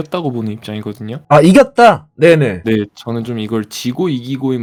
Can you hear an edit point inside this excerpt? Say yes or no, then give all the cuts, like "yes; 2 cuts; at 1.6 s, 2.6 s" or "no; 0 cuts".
no; 0 cuts